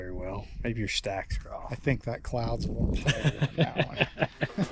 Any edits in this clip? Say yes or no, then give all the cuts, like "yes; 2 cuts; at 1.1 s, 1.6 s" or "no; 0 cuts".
no; 0 cuts